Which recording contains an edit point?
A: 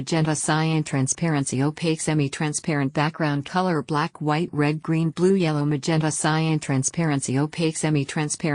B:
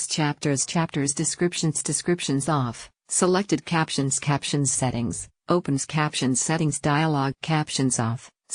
A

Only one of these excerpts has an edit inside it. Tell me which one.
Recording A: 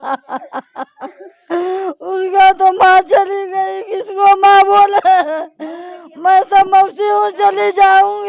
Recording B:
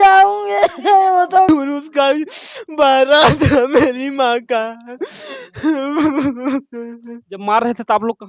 B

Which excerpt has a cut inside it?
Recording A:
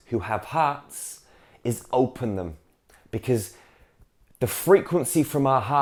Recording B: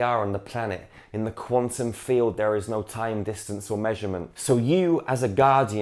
B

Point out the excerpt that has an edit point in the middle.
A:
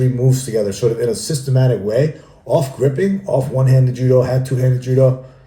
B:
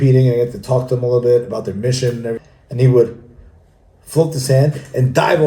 B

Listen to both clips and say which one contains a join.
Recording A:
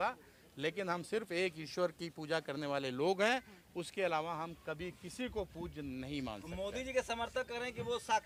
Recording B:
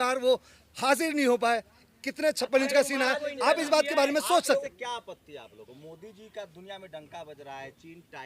B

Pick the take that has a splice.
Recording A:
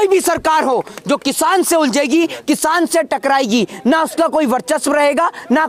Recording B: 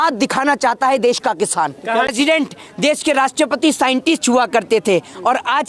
B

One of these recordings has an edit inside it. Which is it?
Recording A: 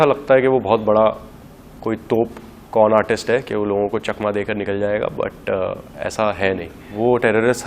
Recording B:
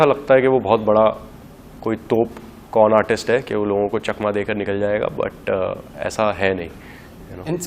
A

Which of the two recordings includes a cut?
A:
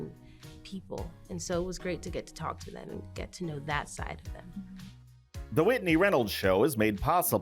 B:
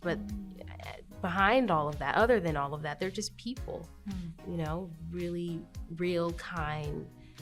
A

